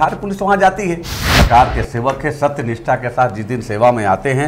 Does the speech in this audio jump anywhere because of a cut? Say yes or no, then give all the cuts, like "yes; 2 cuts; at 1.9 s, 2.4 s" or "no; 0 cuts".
yes; 1 cut; at 1.1 s